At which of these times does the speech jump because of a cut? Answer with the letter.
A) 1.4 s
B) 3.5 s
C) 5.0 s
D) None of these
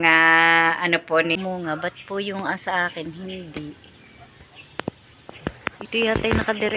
A